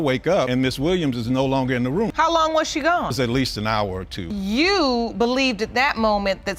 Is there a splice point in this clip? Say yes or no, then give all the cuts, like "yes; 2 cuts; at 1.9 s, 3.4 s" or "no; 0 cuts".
no; 0 cuts